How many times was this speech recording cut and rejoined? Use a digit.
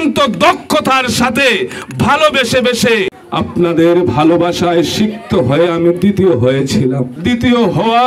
2